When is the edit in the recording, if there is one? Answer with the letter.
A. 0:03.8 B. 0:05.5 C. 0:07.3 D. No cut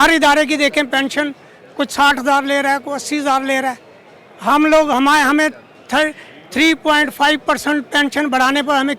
D